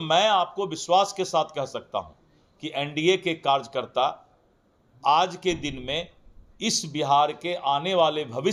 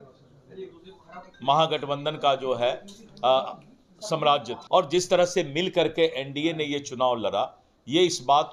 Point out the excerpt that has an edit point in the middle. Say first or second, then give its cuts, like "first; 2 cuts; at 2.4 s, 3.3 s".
second; 1 cut; at 4.5 s